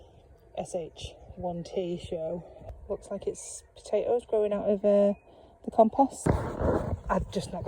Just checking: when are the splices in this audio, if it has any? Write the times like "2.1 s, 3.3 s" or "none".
2.6 s, 6.2 s